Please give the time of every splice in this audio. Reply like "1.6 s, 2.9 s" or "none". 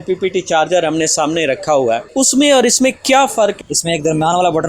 2.1 s, 3.6 s